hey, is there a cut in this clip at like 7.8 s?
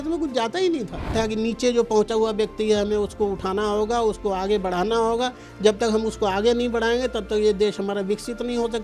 no; 1 cut; at 1.1 s

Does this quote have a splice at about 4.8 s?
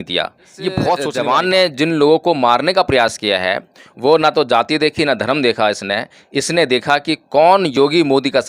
no; 1 cut; at 1.2 s

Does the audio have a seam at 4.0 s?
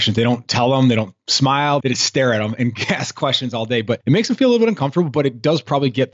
yes; 2 cuts; at 1.8 s, 4.0 s

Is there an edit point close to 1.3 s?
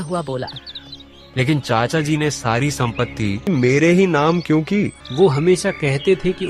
no; 2 cuts; at 3.5 s, 5.0 s

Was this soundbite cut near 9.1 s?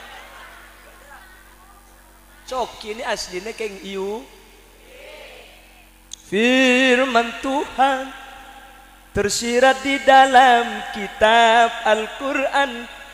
no; 1 cut; at 2.4 s

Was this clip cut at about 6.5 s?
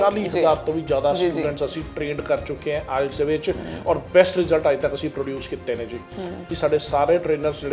yes; 1 cut; at 6.5 s

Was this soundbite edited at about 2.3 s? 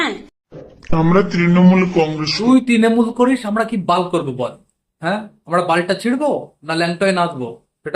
yes; 1 cut; at 2.3 s

